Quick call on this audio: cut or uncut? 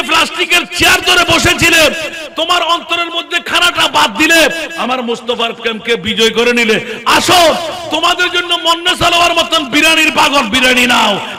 uncut